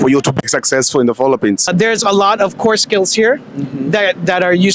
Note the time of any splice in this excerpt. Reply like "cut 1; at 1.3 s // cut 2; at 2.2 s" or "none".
cut 1; at 1.7 s